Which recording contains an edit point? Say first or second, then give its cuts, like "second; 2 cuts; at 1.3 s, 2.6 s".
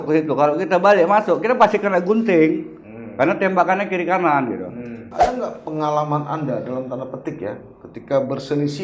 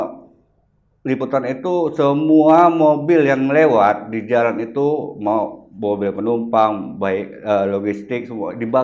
first; 1 cut; at 5.0 s